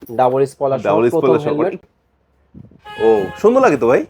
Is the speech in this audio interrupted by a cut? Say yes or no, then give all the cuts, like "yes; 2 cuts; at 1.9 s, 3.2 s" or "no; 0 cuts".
yes; 1 cut; at 1.8 s